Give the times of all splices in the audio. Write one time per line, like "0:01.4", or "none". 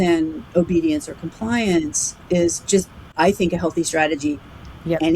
0:03.0

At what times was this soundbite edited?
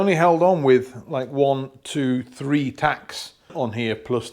none

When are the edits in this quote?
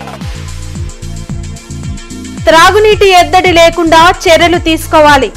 none

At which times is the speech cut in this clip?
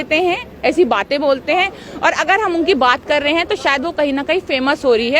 none

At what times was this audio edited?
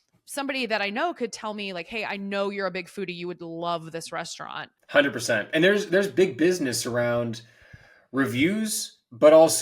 0:04.8

